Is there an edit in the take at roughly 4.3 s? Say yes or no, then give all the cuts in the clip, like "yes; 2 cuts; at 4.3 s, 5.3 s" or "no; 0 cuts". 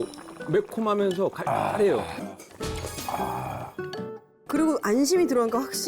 no; 1 cut; at 2.2 s